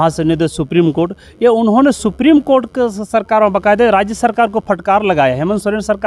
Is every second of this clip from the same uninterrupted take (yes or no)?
yes